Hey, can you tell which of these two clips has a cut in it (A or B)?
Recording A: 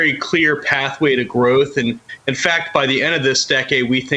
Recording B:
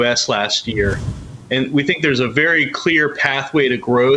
B